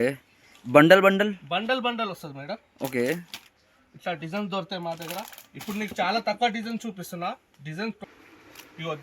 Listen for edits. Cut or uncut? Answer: cut